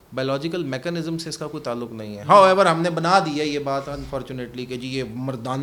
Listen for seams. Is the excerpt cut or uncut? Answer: uncut